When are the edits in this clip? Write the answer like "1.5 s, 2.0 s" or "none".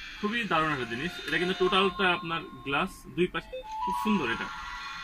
3.4 s